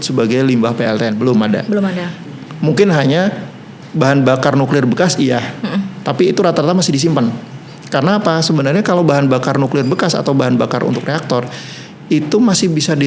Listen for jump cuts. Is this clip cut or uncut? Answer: uncut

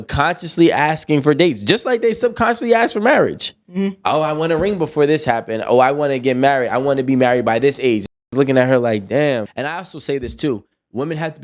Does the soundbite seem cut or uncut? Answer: cut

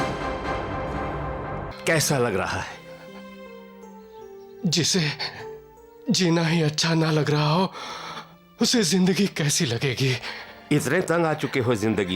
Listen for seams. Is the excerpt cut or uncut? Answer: cut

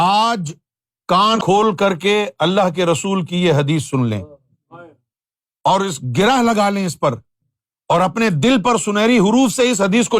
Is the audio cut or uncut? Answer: cut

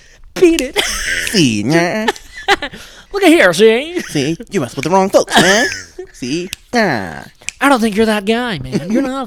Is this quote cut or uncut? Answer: uncut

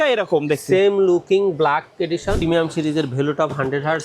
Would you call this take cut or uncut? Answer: cut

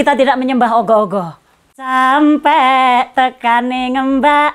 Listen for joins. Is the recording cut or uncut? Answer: cut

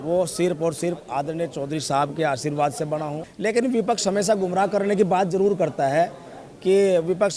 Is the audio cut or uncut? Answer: cut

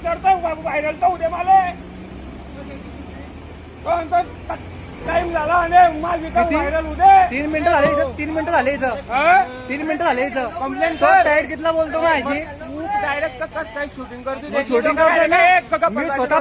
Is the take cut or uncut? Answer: uncut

